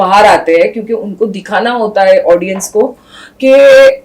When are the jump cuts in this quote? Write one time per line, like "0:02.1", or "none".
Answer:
none